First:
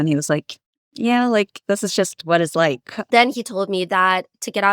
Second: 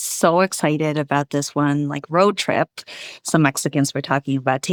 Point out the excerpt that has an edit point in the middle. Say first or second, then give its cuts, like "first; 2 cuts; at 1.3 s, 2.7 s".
first; 1 cut; at 2.9 s